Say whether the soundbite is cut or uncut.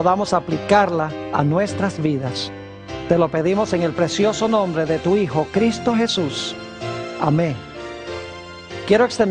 cut